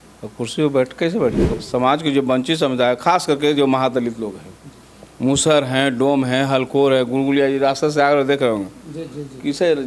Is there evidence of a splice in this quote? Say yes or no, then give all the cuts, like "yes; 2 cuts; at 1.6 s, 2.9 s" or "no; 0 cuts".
yes; 1 cut; at 1.4 s